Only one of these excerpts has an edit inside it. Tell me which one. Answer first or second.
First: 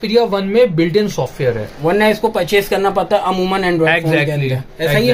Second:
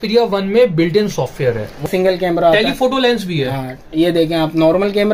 second